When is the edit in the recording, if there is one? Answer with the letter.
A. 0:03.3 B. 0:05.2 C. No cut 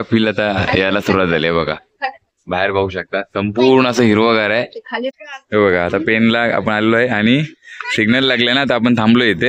B